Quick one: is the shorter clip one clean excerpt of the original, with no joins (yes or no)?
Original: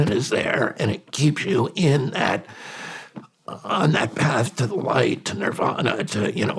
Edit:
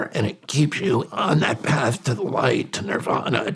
no